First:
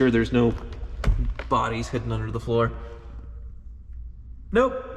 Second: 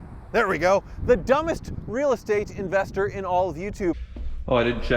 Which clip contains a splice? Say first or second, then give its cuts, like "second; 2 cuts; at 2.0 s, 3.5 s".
second; 1 cut; at 3.9 s